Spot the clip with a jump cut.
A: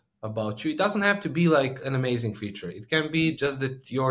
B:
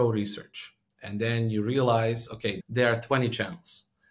B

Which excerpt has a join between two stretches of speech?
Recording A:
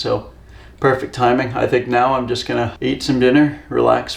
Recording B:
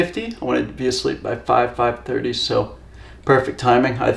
A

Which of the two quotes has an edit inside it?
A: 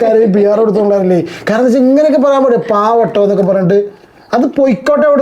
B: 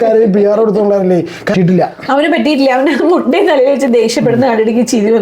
B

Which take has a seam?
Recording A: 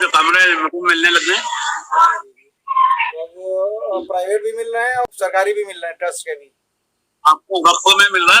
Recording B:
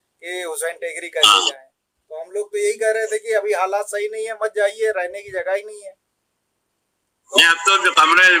A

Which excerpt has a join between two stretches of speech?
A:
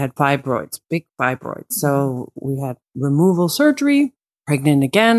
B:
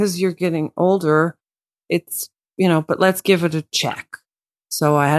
A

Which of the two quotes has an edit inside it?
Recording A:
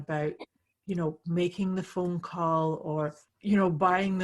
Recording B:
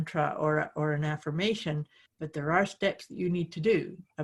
A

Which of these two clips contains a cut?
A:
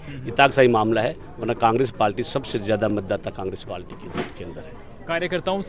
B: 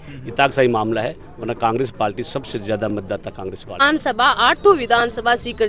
B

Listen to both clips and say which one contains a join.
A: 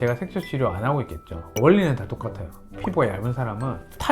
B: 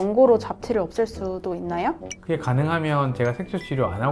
A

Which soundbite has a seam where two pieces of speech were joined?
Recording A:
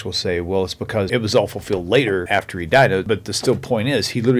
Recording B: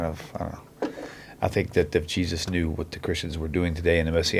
A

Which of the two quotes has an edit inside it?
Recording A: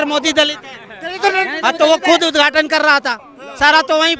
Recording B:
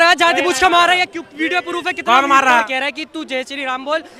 B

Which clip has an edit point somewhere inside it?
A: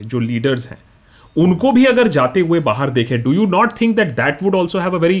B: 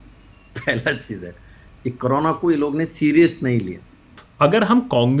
B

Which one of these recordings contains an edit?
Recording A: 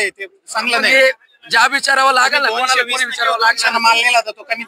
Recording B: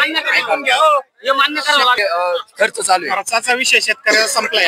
B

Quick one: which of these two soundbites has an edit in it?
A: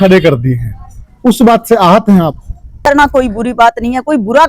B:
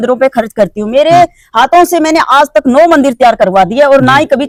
A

